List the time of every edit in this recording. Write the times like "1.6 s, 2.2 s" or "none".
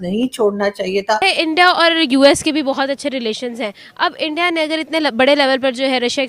1.2 s